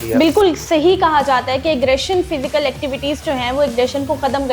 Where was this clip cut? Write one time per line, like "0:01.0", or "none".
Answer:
none